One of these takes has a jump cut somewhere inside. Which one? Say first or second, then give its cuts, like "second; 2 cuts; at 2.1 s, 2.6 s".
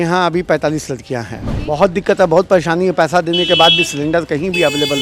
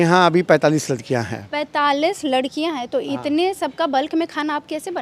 first; 1 cut; at 1.5 s